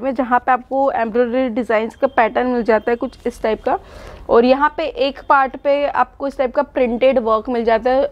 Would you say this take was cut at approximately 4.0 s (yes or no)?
no